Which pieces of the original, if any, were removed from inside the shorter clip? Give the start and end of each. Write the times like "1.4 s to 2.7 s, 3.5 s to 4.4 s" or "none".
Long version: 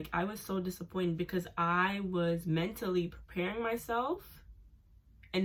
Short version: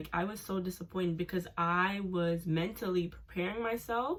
none

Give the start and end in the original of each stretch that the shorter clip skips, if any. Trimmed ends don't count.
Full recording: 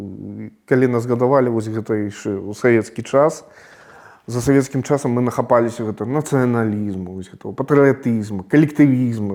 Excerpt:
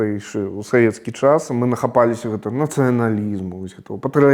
3.4 s to 5.1 s

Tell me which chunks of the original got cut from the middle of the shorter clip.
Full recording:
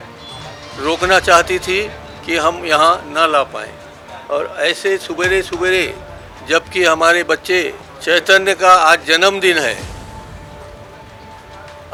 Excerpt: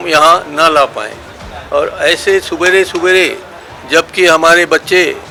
none

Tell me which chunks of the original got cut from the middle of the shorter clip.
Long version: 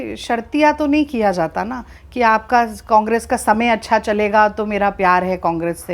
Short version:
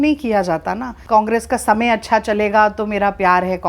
1.9 s to 2.8 s

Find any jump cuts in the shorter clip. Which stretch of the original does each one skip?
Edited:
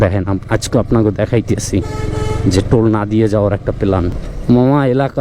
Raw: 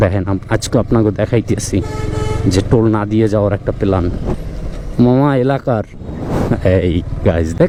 4.2 s to 4.7 s

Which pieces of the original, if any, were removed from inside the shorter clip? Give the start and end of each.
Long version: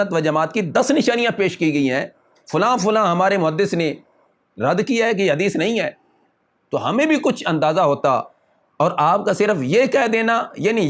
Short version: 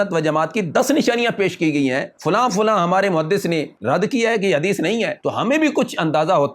2.1 s to 2.4 s, 4.0 s to 4.5 s, 5.9 s to 6.6 s

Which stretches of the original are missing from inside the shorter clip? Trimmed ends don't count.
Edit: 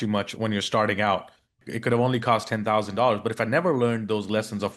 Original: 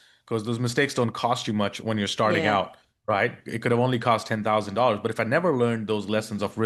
3.0 s to 3.3 s

